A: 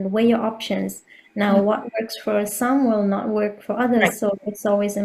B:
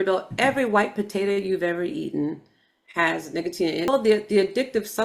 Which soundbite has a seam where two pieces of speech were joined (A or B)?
B